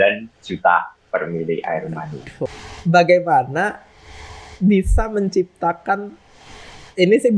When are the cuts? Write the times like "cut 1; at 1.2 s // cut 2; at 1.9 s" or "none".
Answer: cut 1; at 2.3 s